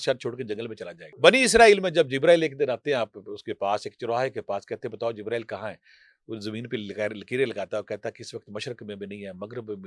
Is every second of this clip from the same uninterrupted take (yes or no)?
no